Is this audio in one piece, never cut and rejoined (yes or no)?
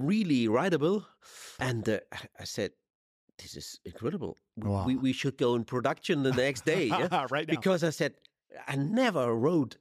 no